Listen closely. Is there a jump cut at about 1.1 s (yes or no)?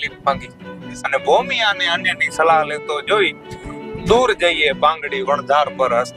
yes